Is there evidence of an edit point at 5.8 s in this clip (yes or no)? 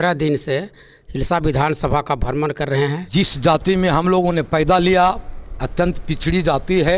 no